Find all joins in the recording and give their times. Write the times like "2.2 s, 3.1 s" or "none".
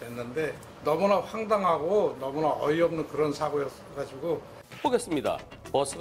none